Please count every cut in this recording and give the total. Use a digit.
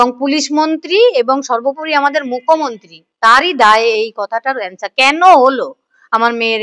0